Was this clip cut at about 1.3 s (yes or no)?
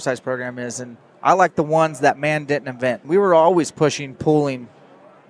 no